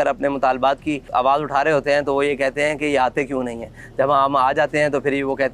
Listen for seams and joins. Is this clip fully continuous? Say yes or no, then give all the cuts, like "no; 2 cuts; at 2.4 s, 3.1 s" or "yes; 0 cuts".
yes; 0 cuts